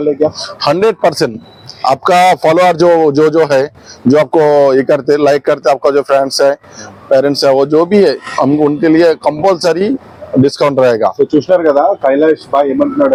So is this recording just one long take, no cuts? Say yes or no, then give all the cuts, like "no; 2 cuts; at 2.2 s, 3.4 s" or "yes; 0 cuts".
yes; 0 cuts